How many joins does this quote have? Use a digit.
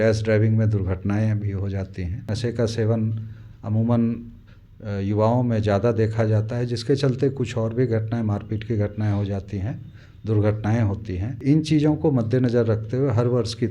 2